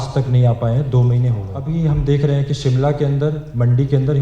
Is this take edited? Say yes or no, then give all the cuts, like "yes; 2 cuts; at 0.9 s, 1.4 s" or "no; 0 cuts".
yes; 1 cut; at 1.6 s